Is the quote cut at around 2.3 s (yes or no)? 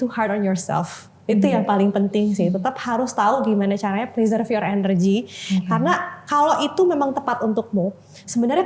no